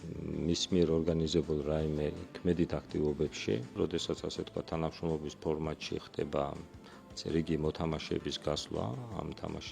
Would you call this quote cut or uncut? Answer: cut